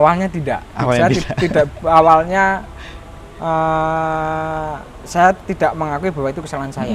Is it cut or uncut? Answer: uncut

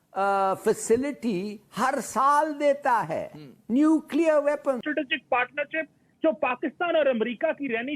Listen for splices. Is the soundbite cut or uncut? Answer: cut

